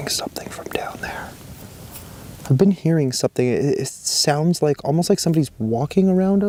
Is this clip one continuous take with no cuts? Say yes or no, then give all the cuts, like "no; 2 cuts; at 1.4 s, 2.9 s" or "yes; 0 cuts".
yes; 0 cuts